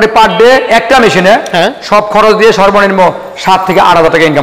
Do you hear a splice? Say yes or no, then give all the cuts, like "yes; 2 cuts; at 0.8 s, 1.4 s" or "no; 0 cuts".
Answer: no; 0 cuts